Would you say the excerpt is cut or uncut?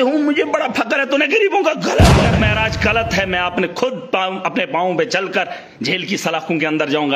cut